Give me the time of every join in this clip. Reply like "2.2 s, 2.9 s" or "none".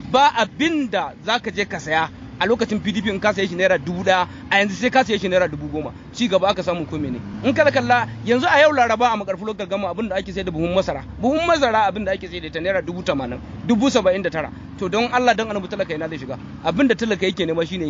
none